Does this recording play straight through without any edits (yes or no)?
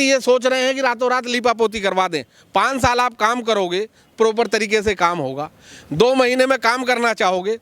yes